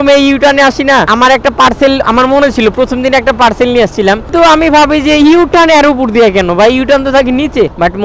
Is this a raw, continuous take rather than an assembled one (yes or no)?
yes